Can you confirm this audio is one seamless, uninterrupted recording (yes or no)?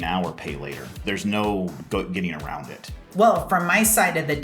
no